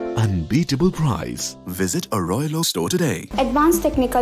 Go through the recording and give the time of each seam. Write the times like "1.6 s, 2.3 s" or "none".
3.2 s